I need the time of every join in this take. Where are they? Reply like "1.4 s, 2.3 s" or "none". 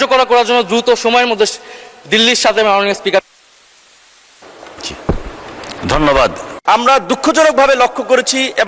6.5 s